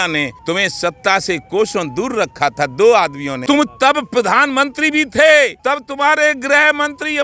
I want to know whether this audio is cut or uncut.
cut